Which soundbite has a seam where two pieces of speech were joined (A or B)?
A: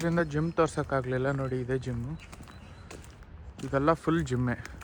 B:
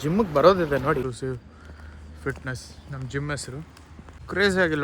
B